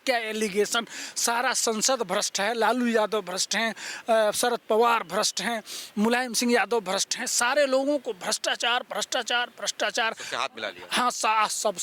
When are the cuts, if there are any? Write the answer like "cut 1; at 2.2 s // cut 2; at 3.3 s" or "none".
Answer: none